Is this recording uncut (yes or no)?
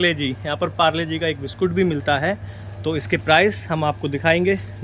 yes